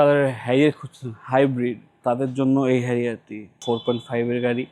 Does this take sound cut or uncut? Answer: cut